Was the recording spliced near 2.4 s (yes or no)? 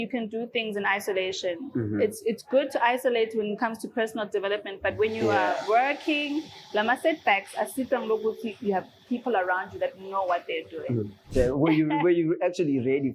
no